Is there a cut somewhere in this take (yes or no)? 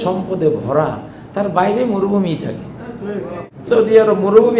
yes